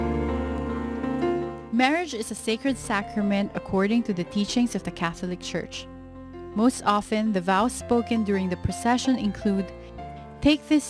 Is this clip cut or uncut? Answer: uncut